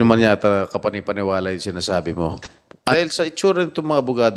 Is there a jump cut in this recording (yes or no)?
yes